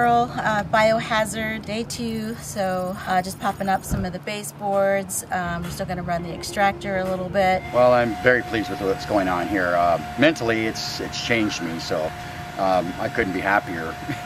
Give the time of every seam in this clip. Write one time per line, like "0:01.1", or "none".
0:01.6
0:03.0
0:07.7